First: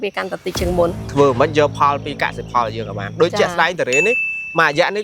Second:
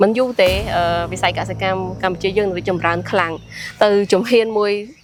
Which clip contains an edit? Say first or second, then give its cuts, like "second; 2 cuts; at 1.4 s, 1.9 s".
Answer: first; 1 cut; at 1.0 s